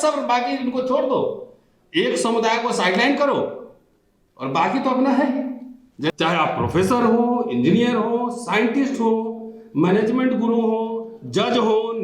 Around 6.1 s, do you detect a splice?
yes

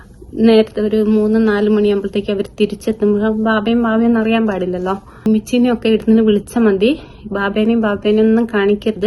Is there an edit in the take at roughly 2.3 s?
no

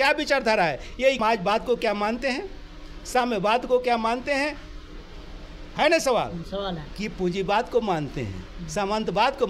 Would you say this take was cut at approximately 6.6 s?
no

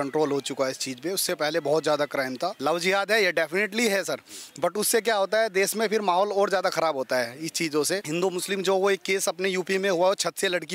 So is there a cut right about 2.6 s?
yes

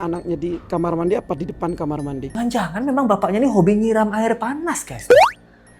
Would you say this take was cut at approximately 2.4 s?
yes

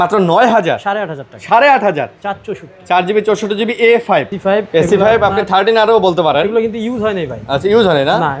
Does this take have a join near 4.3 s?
yes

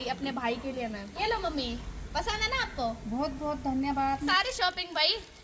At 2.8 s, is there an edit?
no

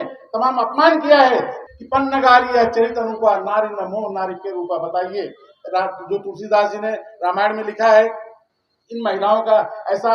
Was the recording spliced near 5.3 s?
no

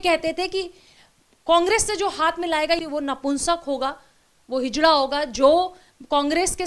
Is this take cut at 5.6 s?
no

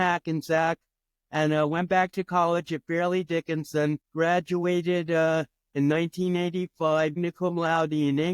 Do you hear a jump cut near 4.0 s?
yes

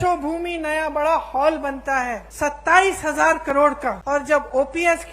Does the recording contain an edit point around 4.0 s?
yes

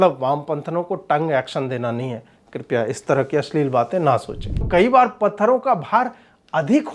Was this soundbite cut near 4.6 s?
yes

